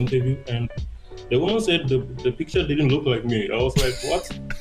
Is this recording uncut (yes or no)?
yes